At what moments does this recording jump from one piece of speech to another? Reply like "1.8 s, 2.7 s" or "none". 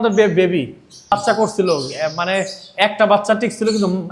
1.1 s

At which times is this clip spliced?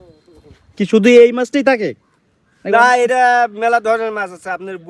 none

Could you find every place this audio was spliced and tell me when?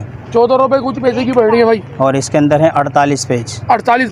none

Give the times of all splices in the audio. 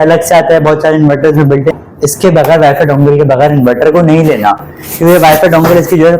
1.8 s

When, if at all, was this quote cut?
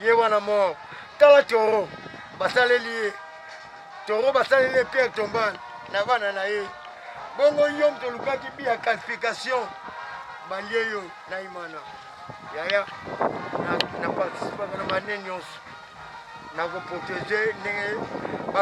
none

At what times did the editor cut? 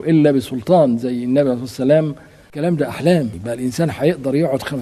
2.5 s, 3.4 s

